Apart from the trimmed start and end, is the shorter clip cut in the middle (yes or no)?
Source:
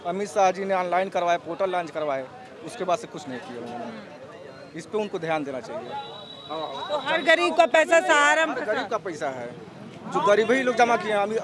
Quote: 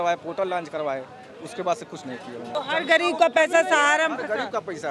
yes